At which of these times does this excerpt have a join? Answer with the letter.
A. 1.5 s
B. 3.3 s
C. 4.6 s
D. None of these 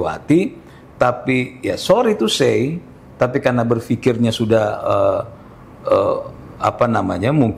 D